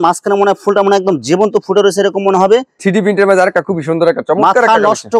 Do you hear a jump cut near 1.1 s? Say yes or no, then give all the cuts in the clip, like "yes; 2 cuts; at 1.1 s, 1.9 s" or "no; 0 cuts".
no; 1 cut; at 2.7 s